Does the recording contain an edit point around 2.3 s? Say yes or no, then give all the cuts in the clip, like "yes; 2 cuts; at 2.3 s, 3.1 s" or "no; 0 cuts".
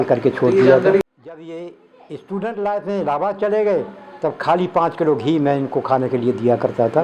no; 1 cut; at 1.0 s